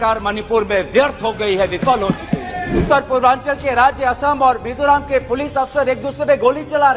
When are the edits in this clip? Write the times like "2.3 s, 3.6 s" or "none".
2.8 s

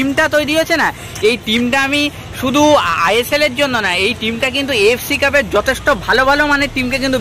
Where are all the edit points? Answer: none

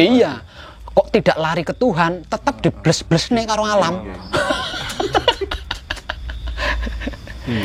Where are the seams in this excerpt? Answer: none

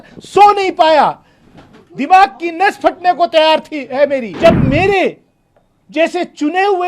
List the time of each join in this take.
4.3 s

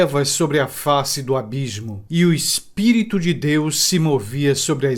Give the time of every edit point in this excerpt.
none

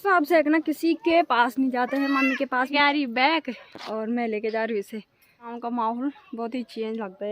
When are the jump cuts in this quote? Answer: 2.7 s, 5.6 s

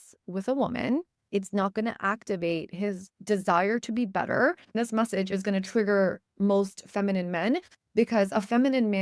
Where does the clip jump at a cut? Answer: 1.2 s, 3.1 s, 4.7 s

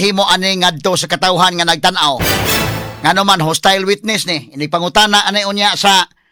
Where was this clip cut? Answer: none

